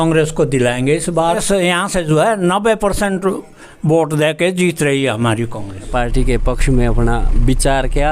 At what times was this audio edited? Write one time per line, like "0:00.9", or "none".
0:01.4
0:05.9